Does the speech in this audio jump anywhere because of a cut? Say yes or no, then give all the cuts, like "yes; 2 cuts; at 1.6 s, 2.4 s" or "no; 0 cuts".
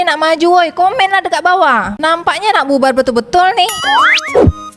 yes; 1 cut; at 3.8 s